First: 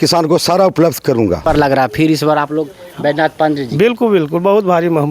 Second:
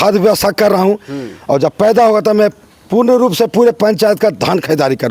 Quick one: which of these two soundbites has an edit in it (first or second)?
first